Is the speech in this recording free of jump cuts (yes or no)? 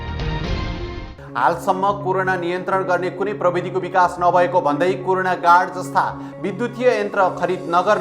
no